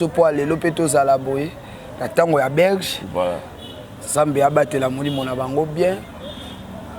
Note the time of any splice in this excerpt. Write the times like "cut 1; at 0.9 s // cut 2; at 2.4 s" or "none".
none